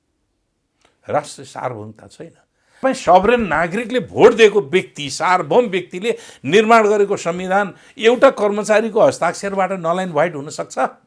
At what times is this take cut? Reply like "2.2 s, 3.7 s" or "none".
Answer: 2.8 s